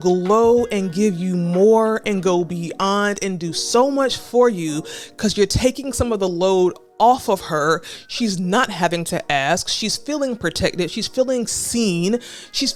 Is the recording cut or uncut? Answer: uncut